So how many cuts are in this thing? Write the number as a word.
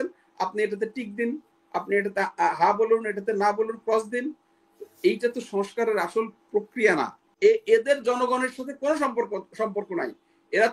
one